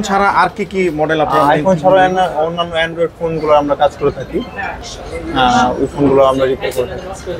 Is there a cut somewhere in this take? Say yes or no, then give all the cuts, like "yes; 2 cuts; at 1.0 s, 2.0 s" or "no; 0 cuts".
no; 0 cuts